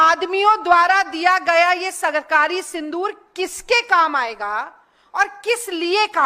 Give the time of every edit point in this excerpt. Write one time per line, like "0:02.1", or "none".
none